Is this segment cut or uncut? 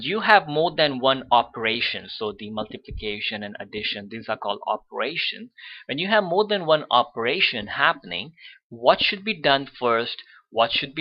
uncut